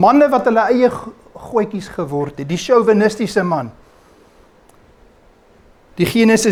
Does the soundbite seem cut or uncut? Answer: uncut